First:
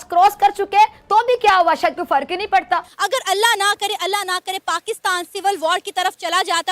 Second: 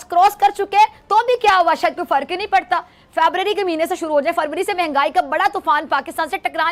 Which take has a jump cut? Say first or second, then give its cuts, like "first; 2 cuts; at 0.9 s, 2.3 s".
first; 1 cut; at 2.9 s